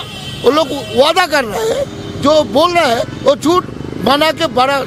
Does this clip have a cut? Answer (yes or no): no